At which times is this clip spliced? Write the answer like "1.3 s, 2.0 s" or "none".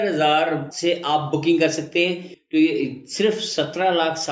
2.3 s

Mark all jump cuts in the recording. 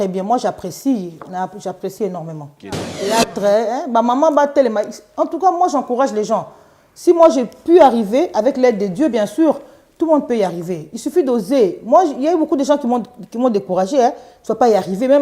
3.0 s

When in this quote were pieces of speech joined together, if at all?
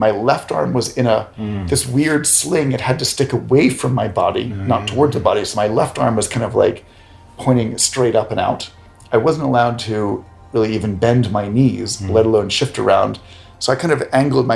none

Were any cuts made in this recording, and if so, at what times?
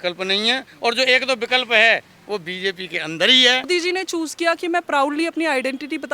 3.7 s

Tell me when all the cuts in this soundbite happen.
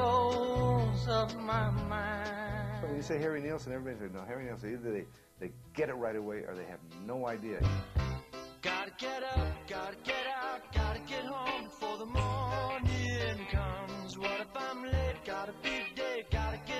7.5 s

